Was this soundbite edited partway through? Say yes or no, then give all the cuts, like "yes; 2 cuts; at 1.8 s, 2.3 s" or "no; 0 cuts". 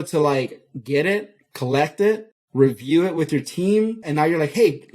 yes; 2 cuts; at 2.4 s, 4.0 s